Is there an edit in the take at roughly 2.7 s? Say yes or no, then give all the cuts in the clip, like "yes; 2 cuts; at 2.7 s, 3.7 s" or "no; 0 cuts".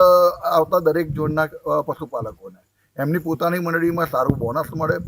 no; 0 cuts